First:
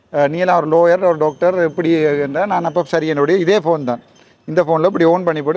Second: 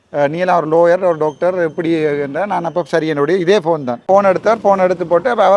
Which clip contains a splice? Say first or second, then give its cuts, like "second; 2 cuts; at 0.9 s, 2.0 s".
second; 1 cut; at 4.0 s